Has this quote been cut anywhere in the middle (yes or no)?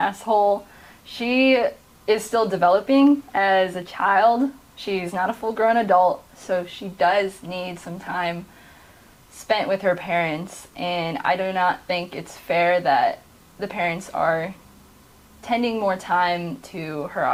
no